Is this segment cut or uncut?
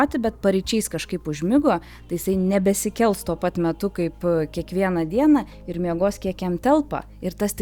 uncut